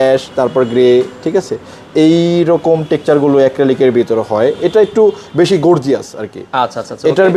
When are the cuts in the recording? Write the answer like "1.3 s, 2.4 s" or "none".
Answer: none